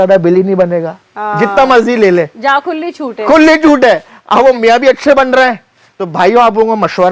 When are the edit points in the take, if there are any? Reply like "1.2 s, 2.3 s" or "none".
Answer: none